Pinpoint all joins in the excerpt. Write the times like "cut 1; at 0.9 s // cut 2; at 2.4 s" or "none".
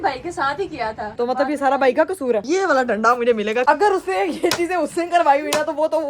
cut 1; at 1.1 s // cut 2; at 2.4 s // cut 3; at 3.6 s